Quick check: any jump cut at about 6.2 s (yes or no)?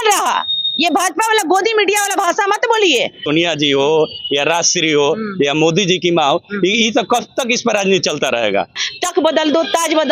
no